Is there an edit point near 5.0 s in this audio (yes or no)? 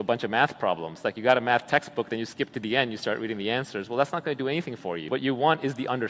yes